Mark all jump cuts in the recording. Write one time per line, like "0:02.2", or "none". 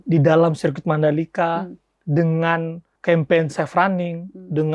0:02.8